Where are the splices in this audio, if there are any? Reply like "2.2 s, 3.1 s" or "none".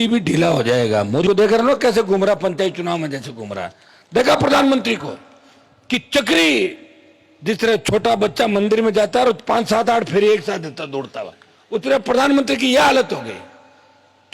1.2 s